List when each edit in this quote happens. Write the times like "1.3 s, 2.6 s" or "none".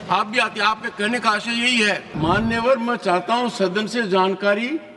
2.1 s